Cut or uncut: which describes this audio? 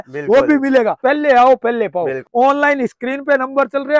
cut